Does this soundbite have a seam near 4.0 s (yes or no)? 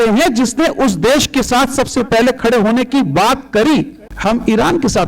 yes